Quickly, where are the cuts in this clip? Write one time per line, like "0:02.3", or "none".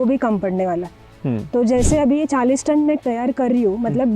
0:03.0